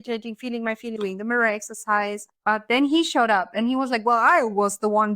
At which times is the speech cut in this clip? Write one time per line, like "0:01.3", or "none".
0:02.3